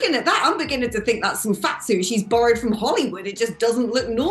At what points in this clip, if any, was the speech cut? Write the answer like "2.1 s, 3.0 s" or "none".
none